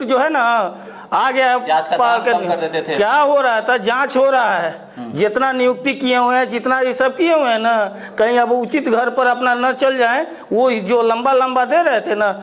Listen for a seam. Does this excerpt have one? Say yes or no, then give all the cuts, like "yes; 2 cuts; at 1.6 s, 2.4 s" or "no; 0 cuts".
no; 0 cuts